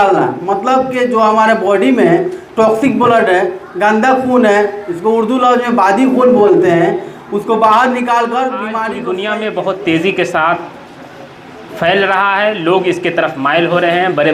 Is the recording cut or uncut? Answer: cut